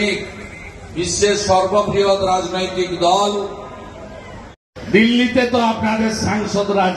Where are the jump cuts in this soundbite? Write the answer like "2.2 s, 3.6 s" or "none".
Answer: 4.6 s